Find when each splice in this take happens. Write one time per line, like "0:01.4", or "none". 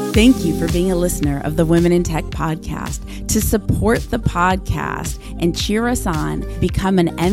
none